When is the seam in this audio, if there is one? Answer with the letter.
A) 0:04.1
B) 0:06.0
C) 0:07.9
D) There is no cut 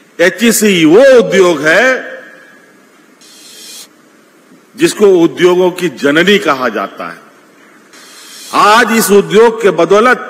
C